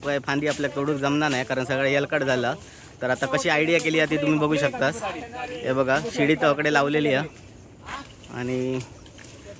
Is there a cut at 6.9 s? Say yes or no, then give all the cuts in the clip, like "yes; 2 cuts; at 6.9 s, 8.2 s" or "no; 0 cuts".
no; 0 cuts